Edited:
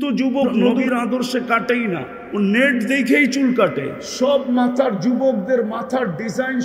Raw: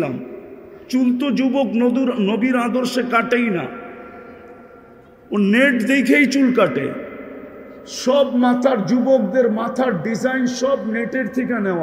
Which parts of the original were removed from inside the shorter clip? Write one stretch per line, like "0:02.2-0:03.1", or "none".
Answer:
0:02.0-0:02.4
0:03.8-0:05.2
0:07.0-0:07.9